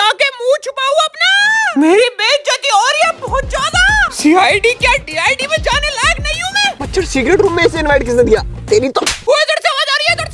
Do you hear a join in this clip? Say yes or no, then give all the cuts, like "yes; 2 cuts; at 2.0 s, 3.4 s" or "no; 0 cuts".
yes; 2 cuts; at 6.8 s, 9.3 s